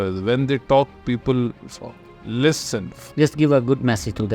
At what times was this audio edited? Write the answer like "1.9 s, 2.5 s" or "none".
2.9 s